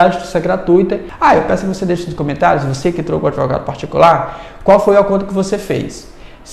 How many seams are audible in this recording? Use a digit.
1